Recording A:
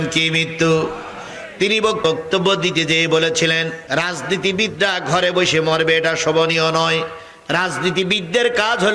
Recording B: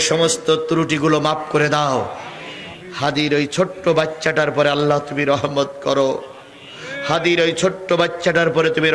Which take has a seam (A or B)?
A